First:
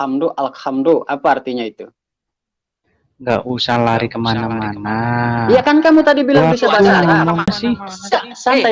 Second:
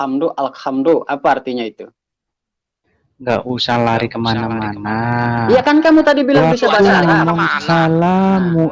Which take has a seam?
first; 1 cut; at 7.6 s

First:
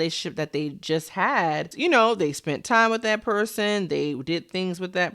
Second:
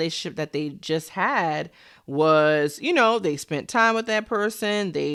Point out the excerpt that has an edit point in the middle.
first; 1 cut; at 1.7 s

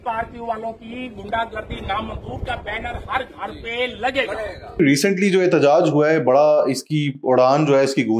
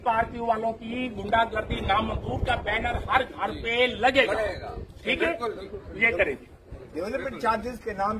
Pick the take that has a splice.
first; 1 cut; at 4.8 s

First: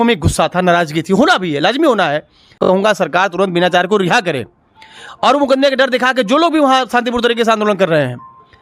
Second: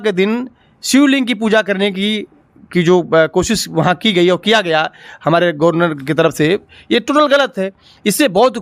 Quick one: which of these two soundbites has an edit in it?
first; 1 cut; at 2.6 s

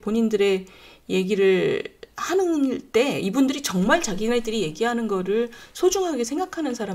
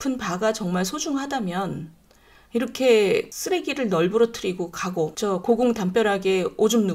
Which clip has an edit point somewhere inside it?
second; 2 cuts; at 3.3 s, 5.1 s

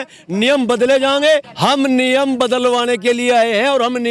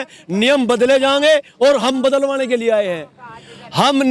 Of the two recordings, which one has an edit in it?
first; 1 cut; at 1.5 s

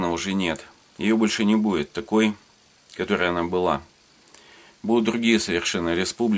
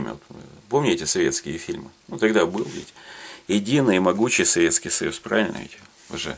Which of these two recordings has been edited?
first; 1 cut; at 4.6 s

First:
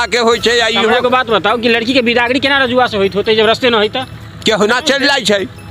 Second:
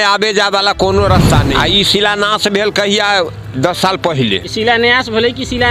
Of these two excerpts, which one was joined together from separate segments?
second; 1 cut; at 1.5 s

